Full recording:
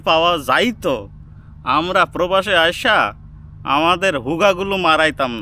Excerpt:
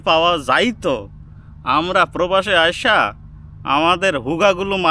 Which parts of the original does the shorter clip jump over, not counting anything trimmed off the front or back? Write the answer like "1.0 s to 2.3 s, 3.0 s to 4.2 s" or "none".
none